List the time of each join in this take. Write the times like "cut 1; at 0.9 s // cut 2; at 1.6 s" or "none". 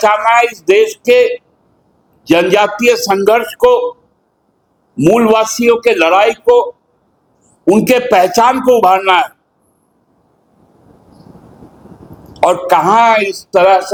none